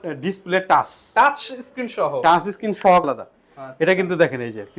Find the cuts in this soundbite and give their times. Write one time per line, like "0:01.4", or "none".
0:03.0